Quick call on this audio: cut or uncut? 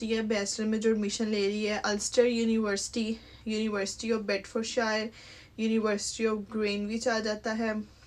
uncut